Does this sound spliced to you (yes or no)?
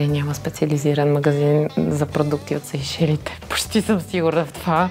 no